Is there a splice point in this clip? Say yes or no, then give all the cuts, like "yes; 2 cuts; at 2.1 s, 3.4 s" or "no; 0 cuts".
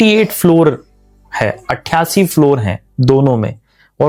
no; 0 cuts